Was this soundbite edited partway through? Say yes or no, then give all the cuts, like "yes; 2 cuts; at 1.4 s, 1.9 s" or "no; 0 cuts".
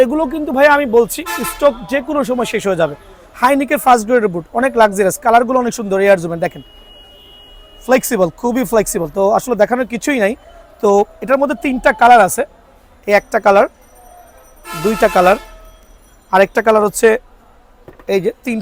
no; 0 cuts